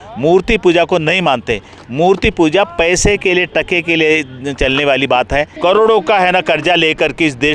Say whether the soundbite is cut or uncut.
cut